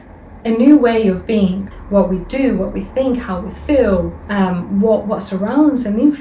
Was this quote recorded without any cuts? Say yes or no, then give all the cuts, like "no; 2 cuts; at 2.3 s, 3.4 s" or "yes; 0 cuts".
no; 2 cuts; at 1.7 s, 4.2 s